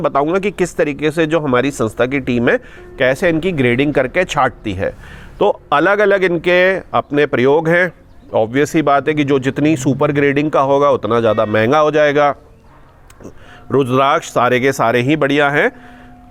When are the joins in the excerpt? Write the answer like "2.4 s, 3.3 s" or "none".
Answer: none

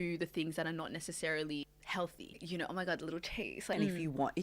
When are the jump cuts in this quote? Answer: 2.3 s, 3.7 s

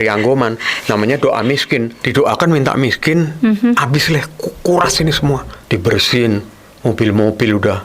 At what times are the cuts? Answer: 2.0 s, 5.5 s

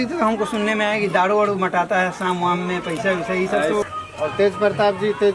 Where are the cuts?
3.8 s

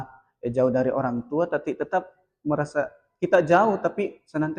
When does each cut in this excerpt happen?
none

